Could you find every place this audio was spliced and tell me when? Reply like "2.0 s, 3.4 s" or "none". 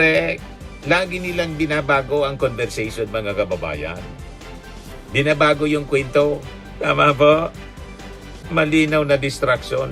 none